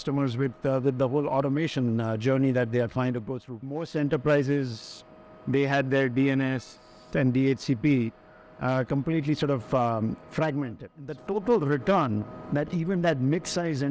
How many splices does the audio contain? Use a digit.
2